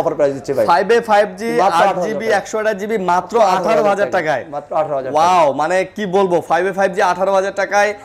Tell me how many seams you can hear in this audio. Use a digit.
0